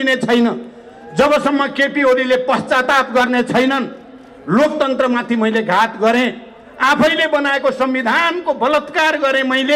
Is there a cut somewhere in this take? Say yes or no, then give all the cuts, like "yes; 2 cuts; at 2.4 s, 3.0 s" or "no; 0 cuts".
no; 0 cuts